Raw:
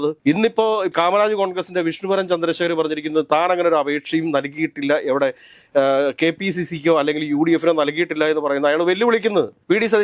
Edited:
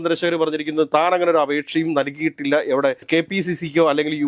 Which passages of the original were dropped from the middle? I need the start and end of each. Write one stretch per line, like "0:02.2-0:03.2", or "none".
0:05.4-0:06.2